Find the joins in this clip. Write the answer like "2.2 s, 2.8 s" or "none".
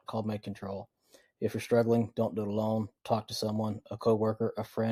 none